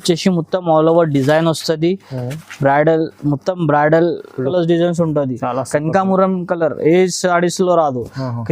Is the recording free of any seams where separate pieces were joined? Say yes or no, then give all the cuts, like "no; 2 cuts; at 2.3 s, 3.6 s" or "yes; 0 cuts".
no; 1 cut; at 4.5 s